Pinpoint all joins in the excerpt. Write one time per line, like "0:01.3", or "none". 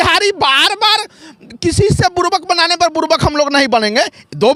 none